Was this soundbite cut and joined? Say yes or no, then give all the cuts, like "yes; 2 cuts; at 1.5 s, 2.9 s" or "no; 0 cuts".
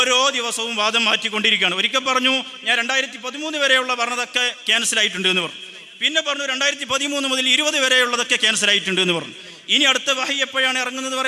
no; 0 cuts